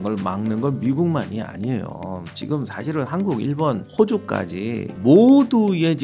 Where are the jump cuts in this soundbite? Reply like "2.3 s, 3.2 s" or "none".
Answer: 3.9 s, 4.9 s